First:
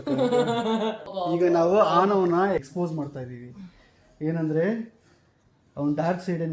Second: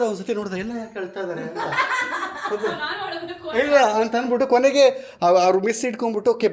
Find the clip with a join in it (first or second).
first